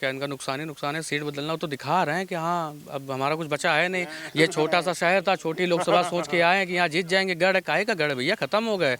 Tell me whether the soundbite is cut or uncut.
uncut